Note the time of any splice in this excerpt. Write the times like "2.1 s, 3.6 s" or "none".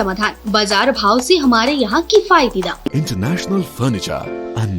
2.9 s